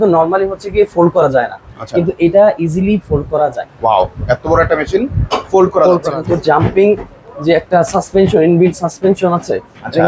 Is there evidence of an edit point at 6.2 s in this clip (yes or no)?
yes